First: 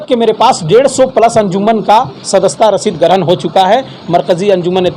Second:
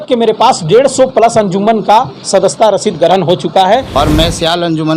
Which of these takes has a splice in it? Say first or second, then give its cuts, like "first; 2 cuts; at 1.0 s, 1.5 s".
second; 1 cut; at 3.9 s